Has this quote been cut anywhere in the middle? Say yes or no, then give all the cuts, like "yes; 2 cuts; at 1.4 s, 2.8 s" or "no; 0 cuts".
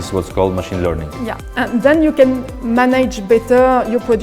yes; 1 cut; at 1.4 s